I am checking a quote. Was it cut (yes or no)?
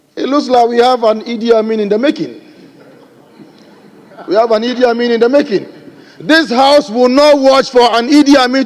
no